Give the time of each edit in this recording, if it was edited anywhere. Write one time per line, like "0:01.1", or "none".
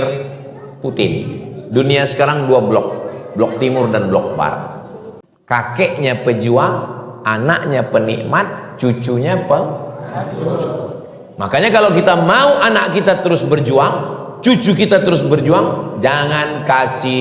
0:05.3